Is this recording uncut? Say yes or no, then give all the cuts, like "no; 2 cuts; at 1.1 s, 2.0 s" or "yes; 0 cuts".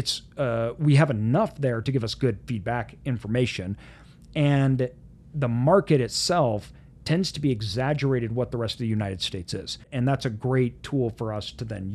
no; 1 cut; at 9.8 s